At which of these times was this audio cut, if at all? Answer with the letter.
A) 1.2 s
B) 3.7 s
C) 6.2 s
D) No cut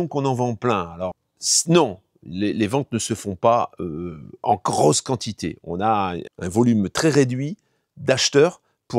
A